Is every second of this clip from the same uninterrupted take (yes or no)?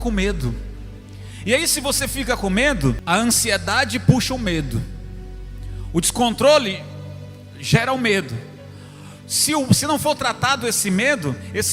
no